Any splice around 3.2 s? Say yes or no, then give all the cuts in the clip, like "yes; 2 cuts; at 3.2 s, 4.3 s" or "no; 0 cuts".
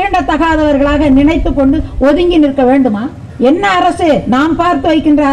yes; 1 cut; at 3.2 s